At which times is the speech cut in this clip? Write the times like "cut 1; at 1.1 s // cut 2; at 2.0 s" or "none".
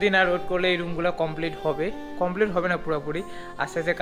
none